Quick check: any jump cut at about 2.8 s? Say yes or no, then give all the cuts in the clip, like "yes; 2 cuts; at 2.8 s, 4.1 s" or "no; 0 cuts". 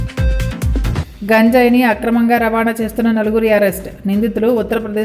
no; 1 cut; at 0.9 s